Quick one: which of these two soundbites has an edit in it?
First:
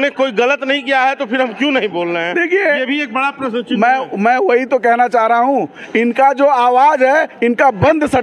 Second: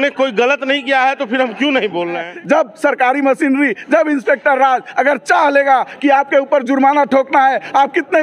second; 1 cut; at 2.3 s

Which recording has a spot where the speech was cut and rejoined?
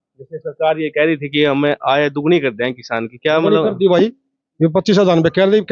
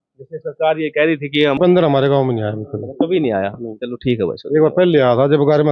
second; 1 cut; at 1.6 s

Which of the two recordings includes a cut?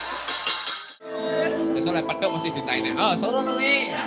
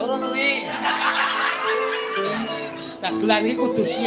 first; 1 cut; at 1.2 s

